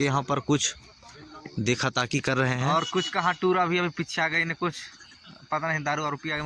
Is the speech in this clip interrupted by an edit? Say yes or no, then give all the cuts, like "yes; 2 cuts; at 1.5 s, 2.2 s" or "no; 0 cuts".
yes; 1 cut; at 2.7 s